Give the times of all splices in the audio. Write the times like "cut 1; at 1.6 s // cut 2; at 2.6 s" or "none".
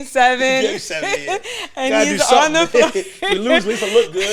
none